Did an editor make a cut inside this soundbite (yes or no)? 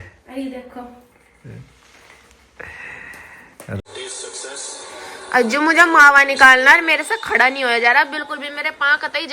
yes